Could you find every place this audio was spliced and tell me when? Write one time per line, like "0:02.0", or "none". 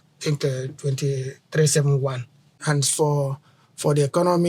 0:02.5